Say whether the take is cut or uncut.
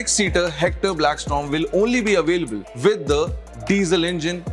cut